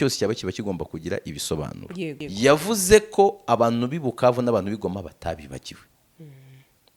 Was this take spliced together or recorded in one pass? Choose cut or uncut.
cut